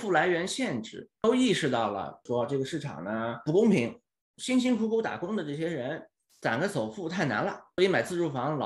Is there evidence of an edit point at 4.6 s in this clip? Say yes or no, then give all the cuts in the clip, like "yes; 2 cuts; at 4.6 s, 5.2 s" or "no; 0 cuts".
no; 2 cuts; at 1.0 s, 2.2 s